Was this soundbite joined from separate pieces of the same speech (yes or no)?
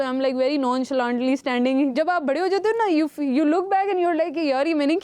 yes